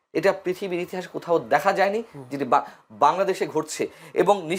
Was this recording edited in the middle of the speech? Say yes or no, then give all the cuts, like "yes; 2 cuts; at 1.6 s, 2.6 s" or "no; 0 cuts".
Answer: no; 0 cuts